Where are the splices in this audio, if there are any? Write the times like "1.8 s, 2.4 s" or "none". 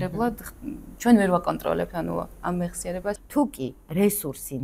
3.2 s